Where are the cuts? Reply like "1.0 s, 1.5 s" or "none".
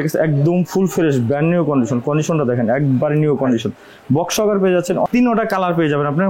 5.1 s

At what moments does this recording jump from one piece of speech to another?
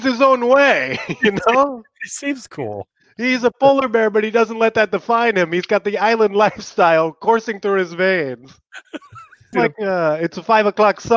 9.5 s

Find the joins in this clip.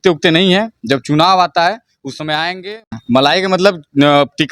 2.7 s

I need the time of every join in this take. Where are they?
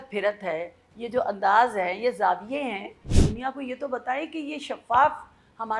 3.1 s

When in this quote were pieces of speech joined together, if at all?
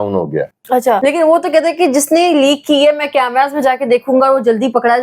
1.0 s

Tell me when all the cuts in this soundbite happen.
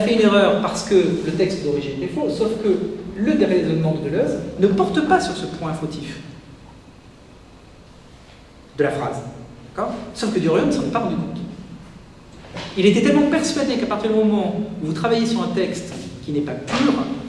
15.9 s

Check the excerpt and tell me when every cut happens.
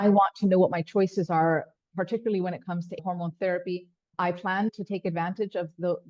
3.0 s

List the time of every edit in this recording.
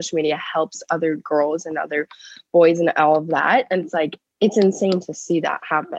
4.2 s

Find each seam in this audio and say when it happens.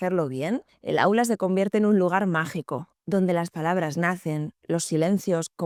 none

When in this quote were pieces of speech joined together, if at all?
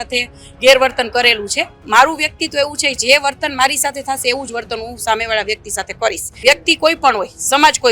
1.8 s, 6.4 s

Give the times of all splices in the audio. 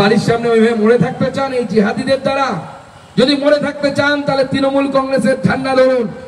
none

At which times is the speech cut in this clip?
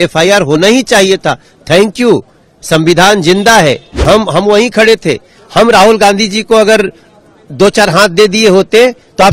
4.0 s

